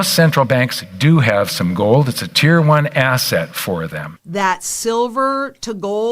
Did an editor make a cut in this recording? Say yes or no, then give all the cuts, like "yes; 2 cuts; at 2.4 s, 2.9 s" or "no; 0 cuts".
yes; 1 cut; at 4.1 s